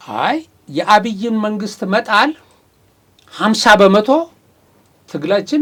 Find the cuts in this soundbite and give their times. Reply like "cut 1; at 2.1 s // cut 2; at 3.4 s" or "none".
none